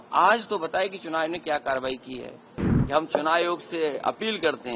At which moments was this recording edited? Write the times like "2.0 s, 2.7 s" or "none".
2.7 s